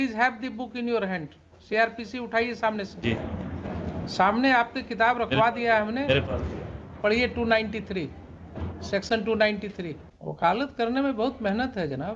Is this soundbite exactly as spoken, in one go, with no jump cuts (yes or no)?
yes